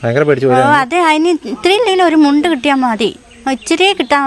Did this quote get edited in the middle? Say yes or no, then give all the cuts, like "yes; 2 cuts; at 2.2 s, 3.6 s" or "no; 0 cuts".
no; 0 cuts